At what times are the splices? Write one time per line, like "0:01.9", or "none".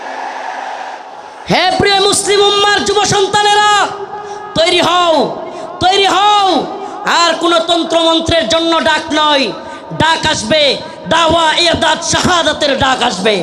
0:01.0